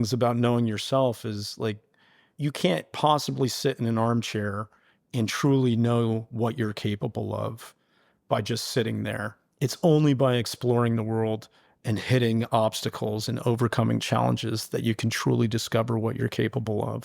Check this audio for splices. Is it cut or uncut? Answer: cut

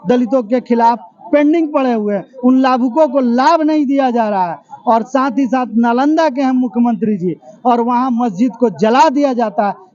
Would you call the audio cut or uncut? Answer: uncut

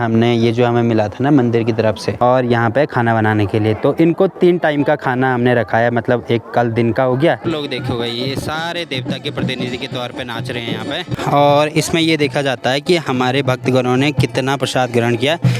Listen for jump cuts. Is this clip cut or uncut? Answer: cut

